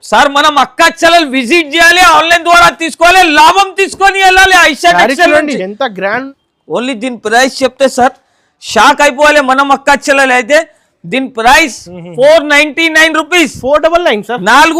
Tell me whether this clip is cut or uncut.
cut